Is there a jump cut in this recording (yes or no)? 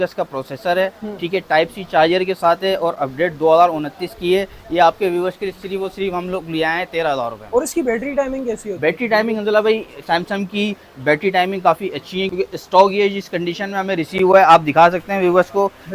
no